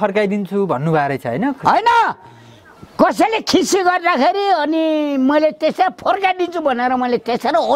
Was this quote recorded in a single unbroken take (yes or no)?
yes